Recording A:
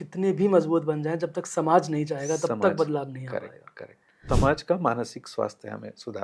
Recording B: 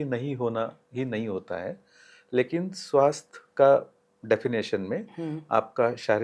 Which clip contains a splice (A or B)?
A